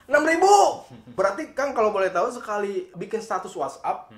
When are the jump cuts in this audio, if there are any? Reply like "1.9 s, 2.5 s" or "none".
1.1 s, 2.9 s